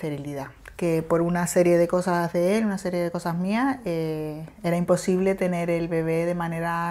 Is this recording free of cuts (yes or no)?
yes